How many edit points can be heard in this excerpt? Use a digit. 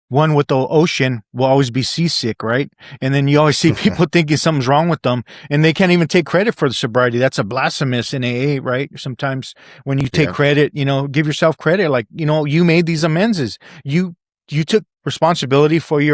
1